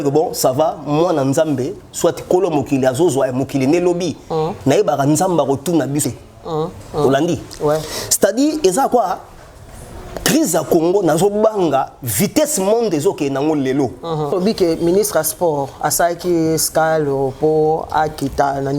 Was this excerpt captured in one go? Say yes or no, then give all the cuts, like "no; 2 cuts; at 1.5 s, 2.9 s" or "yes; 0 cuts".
no; 2 cuts; at 6.0 s, 14.3 s